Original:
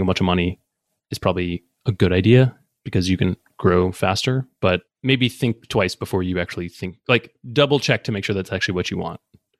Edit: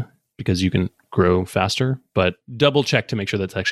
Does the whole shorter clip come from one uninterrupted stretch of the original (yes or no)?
no